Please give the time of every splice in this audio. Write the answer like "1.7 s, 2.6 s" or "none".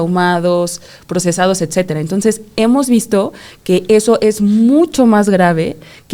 none